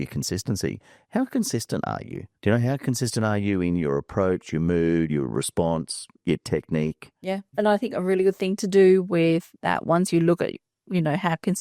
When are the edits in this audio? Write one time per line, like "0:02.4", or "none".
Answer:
none